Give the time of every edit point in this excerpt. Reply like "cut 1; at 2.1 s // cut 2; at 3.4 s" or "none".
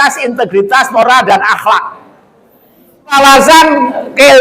cut 1; at 3.1 s